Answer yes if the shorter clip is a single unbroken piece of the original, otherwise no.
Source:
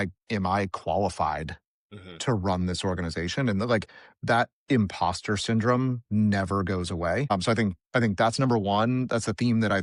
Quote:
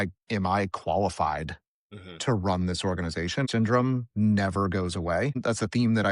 no